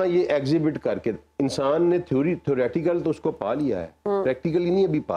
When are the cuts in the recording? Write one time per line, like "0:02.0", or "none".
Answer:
none